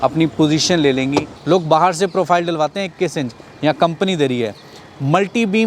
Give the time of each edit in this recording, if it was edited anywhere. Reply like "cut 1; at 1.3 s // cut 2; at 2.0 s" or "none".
cut 1; at 1.3 s

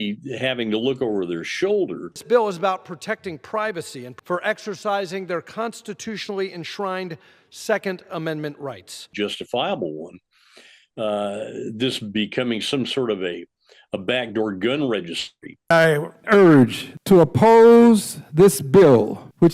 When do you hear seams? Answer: cut 1; at 2.1 s // cut 2; at 9.0 s // cut 3; at 15.6 s

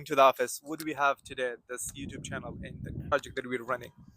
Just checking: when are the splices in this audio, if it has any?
cut 1; at 3.1 s

